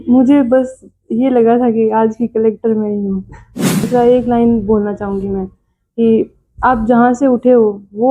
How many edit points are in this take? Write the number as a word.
one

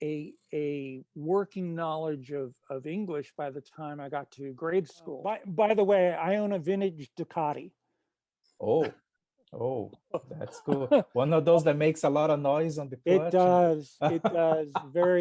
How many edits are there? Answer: one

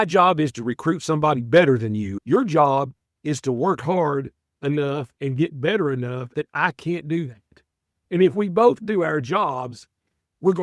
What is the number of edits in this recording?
two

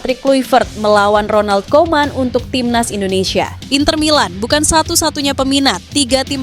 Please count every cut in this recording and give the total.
one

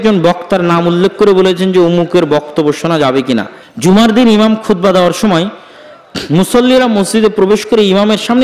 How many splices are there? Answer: one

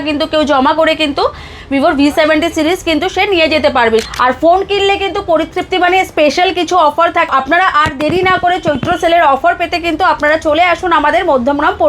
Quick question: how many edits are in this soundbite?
two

